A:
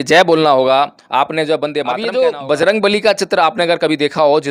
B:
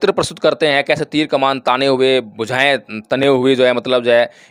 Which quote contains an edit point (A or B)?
A